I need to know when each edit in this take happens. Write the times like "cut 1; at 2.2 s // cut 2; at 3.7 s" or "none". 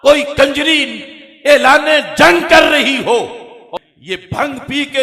cut 1; at 3.6 s